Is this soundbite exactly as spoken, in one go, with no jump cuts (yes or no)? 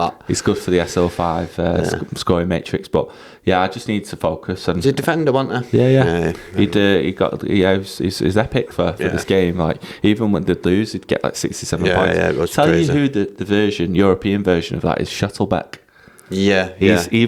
yes